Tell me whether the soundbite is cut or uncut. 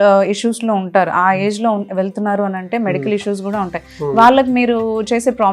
uncut